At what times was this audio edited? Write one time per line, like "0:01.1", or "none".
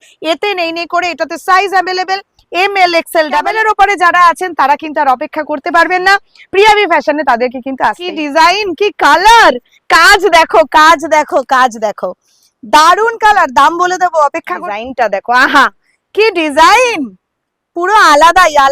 0:03.4
0:08.1
0:14.6